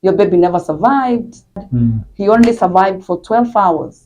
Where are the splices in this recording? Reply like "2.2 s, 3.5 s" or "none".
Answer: 1.5 s

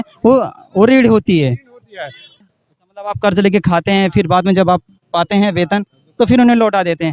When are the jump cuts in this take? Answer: 2.4 s

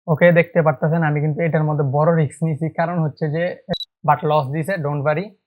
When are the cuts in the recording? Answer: 3.7 s

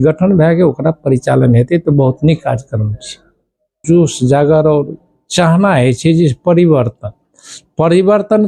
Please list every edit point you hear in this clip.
3.8 s

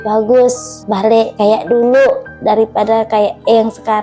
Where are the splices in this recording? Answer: 1.1 s

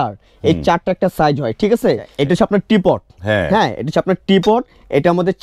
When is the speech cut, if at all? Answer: 2.1 s

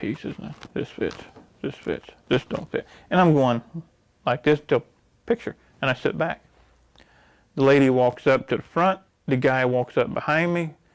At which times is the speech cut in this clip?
none

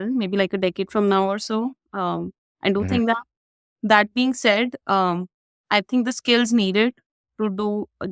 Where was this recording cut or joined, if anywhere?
none

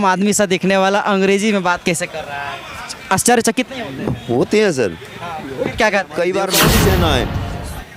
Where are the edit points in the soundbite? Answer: 6.6 s

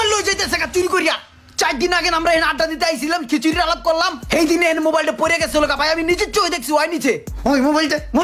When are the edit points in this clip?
none

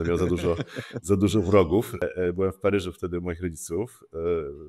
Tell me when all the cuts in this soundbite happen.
2.0 s

